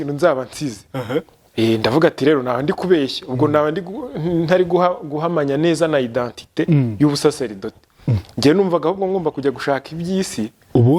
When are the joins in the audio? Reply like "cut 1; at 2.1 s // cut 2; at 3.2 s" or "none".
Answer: none